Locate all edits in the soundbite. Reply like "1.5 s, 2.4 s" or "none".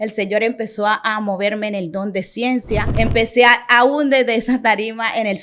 2.9 s